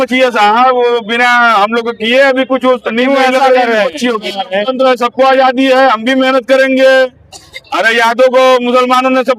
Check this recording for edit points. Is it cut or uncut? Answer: cut